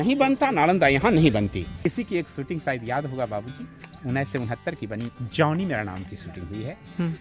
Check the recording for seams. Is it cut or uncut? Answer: cut